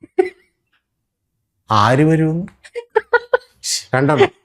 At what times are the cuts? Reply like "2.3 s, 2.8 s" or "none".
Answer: 3.6 s

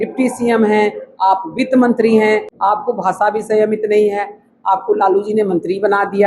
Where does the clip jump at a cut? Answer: 2.5 s

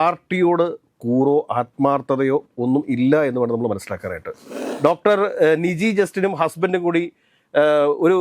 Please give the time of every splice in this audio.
4.6 s

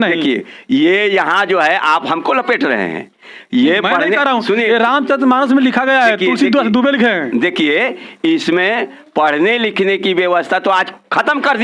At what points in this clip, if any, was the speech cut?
none

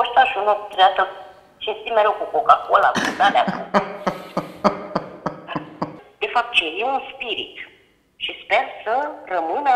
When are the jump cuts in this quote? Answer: 6.0 s

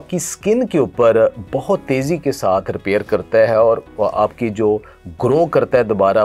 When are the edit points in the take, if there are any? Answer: none

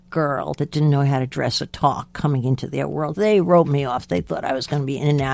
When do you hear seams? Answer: none

